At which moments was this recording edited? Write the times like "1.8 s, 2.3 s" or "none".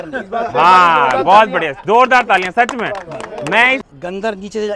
3.8 s